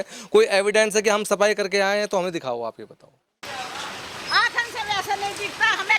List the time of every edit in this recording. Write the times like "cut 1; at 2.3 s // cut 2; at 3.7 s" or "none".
cut 1; at 3.4 s